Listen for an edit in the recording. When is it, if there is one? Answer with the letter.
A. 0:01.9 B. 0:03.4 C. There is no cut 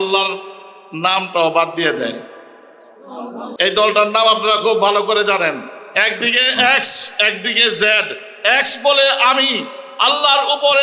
B